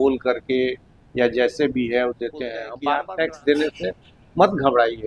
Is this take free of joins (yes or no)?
no